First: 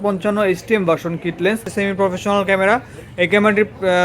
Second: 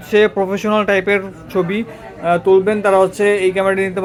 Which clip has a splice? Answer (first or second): first